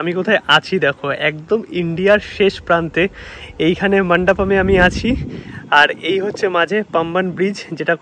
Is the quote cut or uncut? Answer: uncut